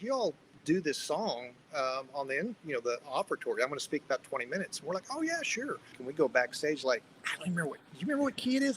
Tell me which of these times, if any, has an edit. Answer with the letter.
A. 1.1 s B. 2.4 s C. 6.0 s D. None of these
C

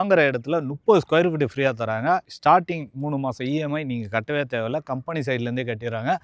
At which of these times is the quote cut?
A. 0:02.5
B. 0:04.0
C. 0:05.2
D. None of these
D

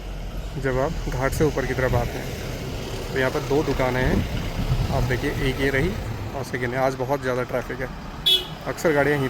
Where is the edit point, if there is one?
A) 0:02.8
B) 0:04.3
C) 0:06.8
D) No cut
D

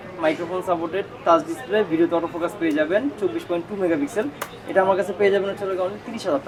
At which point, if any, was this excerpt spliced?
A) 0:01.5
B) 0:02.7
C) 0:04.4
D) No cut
D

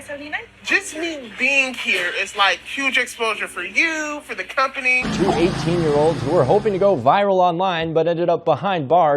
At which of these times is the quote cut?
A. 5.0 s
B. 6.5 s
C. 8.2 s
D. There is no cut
A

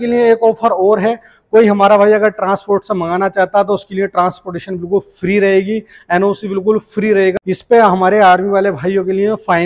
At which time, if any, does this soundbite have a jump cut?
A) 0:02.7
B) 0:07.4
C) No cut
B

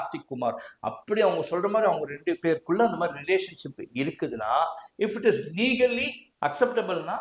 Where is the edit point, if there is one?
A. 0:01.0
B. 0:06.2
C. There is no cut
B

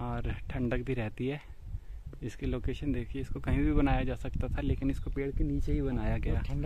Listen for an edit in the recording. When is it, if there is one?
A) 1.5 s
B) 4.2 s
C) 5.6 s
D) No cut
D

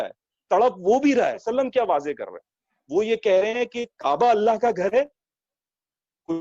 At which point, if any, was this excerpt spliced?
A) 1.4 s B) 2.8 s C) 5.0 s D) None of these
A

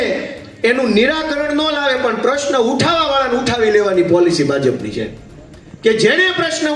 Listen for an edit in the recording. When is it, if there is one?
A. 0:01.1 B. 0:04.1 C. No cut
C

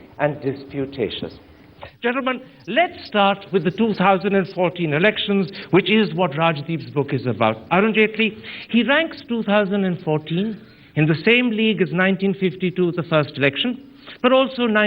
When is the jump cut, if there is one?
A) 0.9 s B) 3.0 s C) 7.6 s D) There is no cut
B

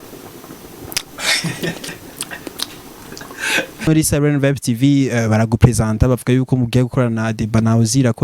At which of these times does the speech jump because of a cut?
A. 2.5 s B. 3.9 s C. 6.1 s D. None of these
B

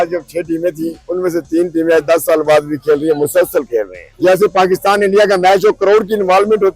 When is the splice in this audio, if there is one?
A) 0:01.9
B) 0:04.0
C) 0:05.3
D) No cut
B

